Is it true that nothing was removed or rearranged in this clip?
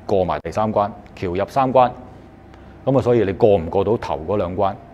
yes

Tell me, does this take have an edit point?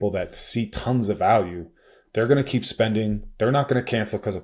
no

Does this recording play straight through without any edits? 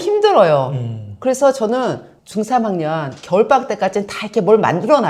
yes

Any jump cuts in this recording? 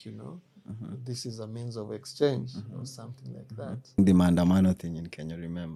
yes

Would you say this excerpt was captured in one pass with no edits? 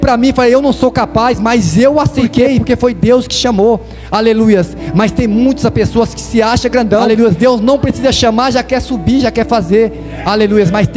no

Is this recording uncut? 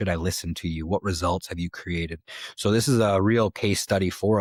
yes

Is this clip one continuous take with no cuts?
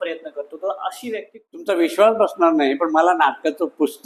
no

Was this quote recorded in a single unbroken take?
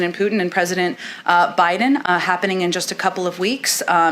yes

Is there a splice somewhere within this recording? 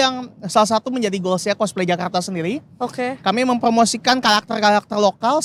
no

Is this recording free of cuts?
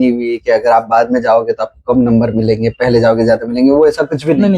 yes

